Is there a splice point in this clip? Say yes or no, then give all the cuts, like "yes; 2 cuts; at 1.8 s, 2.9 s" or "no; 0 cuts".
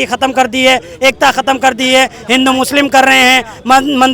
no; 0 cuts